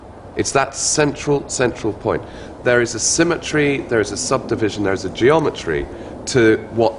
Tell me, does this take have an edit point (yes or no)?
yes